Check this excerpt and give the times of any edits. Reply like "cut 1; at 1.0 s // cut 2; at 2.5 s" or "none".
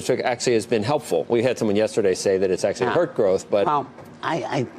none

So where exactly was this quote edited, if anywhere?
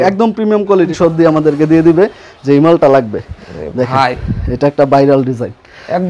cut 1; at 0.9 s

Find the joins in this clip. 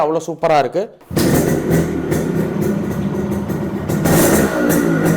cut 1; at 1.0 s

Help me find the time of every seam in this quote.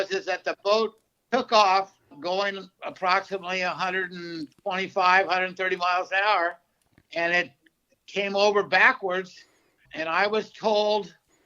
cut 1; at 2.2 s

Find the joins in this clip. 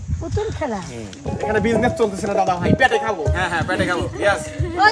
cut 1; at 1.2 s

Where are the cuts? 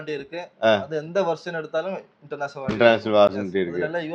none

